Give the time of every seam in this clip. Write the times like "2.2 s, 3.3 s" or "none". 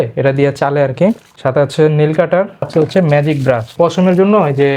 1.3 s, 2.7 s, 3.7 s